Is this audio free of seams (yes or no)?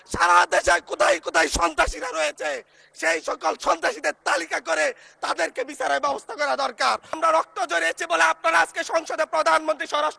no